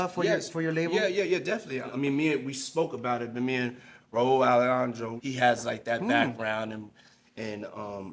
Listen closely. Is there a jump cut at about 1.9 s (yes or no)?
yes